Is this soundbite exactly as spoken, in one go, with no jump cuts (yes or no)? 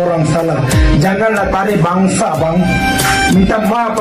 yes